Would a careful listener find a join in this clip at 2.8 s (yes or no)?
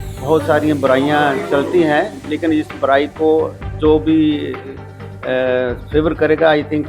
no